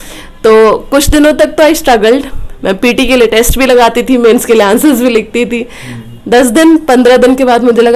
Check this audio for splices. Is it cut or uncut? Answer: uncut